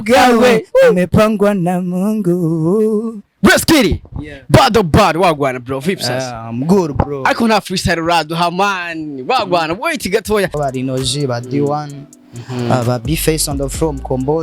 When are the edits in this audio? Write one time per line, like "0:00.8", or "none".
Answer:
0:10.5